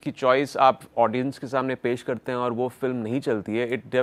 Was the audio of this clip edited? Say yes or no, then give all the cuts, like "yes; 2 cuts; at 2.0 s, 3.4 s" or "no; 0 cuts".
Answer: no; 0 cuts